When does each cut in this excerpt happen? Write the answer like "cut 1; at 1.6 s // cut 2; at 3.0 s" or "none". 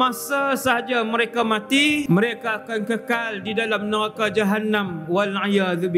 cut 1; at 2.0 s